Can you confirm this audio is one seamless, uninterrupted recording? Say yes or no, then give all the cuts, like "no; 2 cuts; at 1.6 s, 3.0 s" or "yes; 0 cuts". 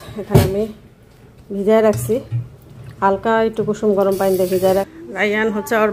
no; 1 cut; at 4.9 s